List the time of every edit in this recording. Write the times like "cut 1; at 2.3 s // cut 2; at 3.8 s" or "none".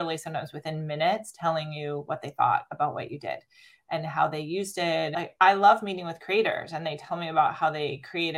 cut 1; at 5.1 s